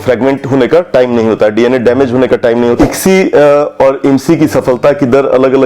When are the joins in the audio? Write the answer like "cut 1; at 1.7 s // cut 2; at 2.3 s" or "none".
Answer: cut 1; at 2.8 s